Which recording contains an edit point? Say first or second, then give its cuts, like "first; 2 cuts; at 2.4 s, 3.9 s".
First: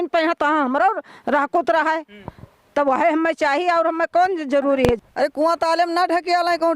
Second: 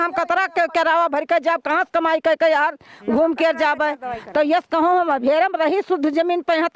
first; 1 cut; at 5.0 s